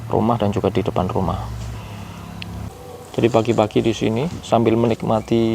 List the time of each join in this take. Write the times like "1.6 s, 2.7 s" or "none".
2.7 s